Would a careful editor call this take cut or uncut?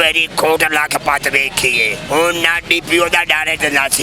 cut